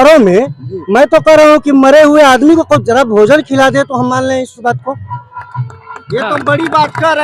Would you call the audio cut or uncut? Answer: uncut